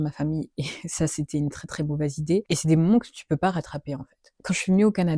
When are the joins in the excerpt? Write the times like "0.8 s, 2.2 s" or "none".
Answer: 2.4 s, 4.4 s